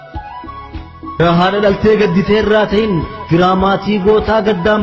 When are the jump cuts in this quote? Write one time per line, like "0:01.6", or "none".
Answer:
0:01.2